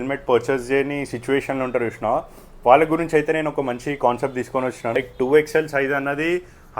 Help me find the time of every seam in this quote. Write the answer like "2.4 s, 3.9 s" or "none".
4.9 s